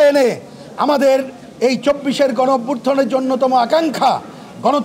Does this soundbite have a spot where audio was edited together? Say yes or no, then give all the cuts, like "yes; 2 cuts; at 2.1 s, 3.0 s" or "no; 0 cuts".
no; 0 cuts